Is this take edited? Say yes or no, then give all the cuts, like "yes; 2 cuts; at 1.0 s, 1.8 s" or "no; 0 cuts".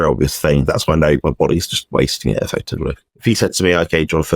yes; 1 cut; at 3.1 s